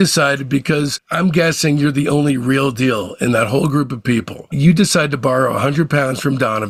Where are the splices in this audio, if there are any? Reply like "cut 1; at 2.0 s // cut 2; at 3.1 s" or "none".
none